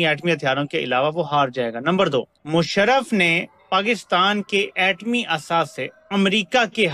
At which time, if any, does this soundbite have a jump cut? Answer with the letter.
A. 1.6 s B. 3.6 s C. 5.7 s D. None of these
D